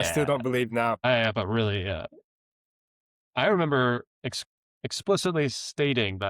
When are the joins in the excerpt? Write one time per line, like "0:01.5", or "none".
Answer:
0:01.0